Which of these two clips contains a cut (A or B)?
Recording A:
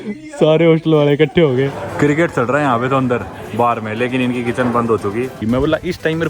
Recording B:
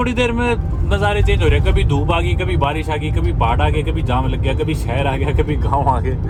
A